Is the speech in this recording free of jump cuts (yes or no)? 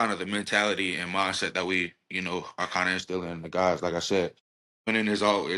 yes